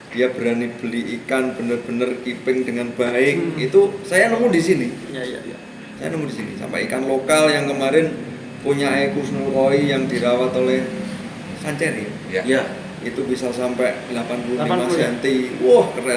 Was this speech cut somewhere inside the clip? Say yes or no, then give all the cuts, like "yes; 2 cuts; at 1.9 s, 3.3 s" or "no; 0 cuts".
no; 0 cuts